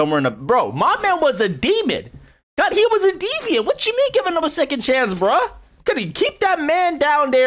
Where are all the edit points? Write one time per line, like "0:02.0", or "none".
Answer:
none